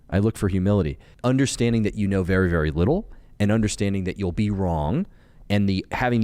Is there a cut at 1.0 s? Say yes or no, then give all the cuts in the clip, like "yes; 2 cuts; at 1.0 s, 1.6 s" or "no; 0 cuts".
yes; 1 cut; at 1.0 s